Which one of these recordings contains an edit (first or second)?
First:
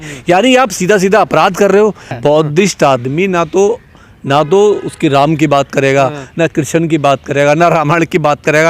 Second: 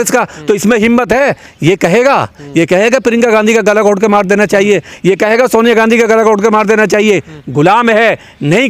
first